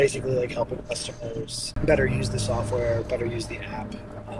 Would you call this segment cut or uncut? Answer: uncut